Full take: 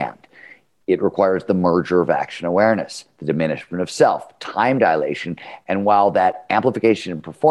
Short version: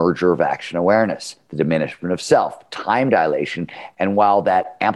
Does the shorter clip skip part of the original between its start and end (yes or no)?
no